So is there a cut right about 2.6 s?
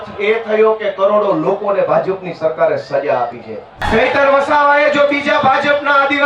no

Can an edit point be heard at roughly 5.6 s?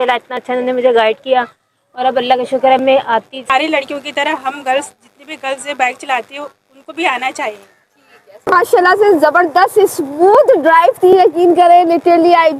no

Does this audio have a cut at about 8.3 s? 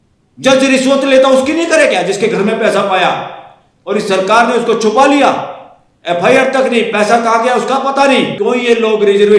yes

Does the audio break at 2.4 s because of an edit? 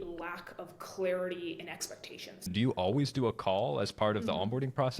yes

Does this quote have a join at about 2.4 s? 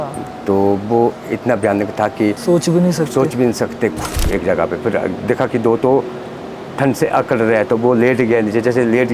yes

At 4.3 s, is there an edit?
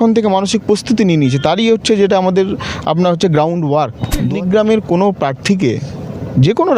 yes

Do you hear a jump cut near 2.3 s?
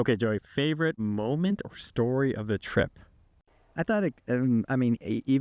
no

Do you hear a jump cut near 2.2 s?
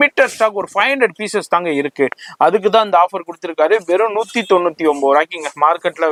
no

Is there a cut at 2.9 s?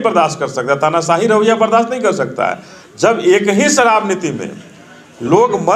no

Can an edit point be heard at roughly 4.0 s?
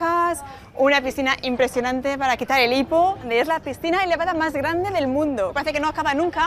no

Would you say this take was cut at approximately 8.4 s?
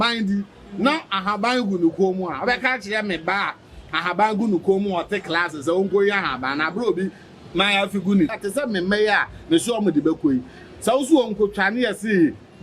yes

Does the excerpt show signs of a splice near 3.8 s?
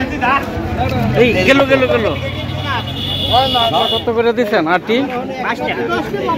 yes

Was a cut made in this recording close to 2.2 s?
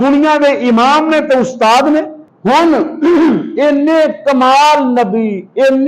yes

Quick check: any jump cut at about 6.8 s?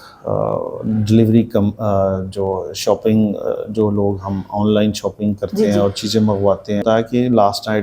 yes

